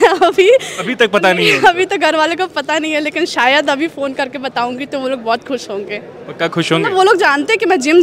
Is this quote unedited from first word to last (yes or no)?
yes